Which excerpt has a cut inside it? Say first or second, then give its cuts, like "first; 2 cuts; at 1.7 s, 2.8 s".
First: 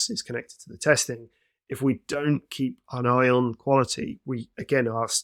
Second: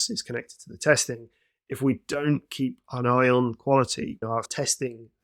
second; 1 cut; at 4.3 s